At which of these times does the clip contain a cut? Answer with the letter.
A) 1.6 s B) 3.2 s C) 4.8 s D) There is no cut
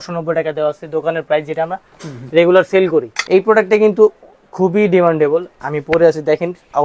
B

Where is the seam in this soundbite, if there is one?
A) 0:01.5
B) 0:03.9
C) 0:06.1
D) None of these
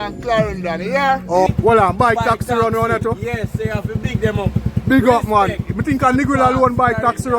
A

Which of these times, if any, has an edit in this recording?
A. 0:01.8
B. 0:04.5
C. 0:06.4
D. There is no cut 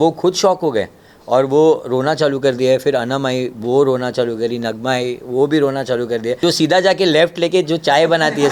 C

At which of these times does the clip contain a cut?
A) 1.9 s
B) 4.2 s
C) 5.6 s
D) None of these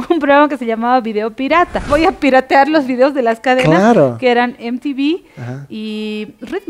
A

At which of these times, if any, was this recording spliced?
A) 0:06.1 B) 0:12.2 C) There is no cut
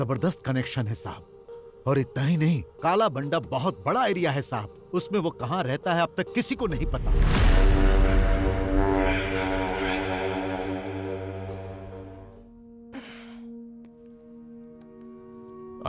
B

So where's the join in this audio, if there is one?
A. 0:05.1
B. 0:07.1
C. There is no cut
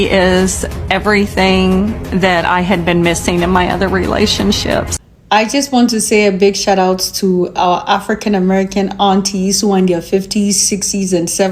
A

